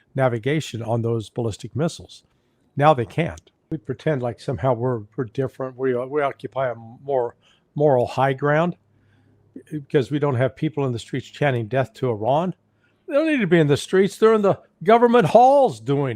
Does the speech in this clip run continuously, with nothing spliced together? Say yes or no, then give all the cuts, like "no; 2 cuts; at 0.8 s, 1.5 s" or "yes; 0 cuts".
no; 1 cut; at 3.7 s